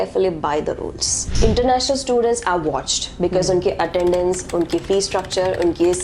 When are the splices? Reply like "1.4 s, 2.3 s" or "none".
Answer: 1.3 s